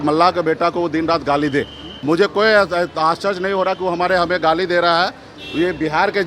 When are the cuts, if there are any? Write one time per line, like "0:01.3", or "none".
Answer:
0:01.8